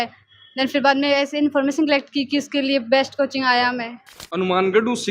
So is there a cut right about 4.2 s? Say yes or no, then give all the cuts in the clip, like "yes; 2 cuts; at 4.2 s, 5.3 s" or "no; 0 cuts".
yes; 1 cut; at 4.2 s